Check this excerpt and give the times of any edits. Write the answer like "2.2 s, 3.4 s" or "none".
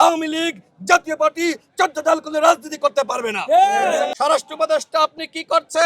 4.1 s